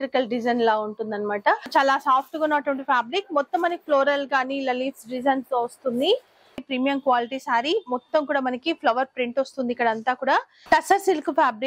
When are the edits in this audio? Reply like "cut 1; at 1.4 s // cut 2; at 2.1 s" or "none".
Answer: cut 1; at 1.7 s // cut 2; at 6.6 s // cut 3; at 10.5 s